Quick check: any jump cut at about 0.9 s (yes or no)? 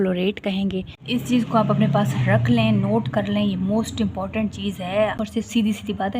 yes